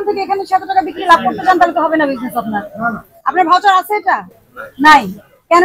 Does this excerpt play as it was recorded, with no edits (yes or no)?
yes